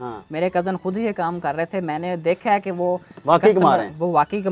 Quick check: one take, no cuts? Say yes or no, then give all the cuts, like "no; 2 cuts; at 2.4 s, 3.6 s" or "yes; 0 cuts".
yes; 0 cuts